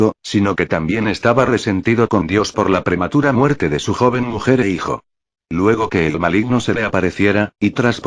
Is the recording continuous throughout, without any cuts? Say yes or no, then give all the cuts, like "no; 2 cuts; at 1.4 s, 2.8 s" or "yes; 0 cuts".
no; 1 cut; at 1.8 s